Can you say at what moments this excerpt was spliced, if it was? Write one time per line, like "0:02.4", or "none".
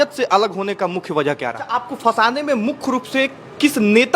0:01.9